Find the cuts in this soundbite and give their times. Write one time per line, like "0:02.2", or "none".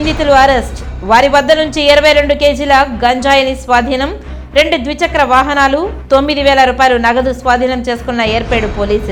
none

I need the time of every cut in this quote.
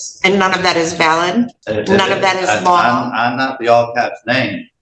0:01.6

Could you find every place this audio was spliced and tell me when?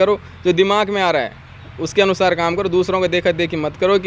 none

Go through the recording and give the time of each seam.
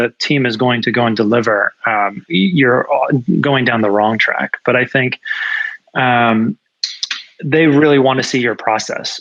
none

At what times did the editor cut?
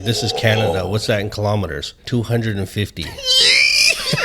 0:02.0

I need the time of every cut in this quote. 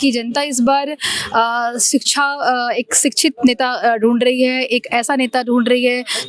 none

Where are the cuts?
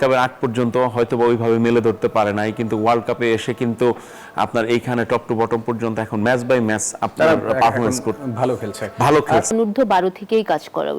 0:09.5

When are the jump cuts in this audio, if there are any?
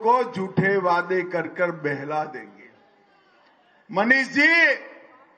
0:02.4

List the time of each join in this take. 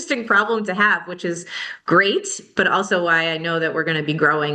none

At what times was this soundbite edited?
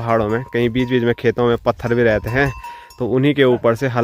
none

